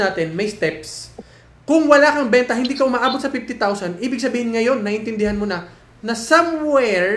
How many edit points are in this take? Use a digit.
0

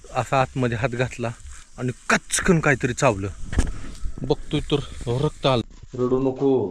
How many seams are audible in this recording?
1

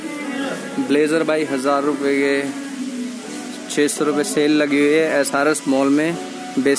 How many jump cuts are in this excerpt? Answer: 0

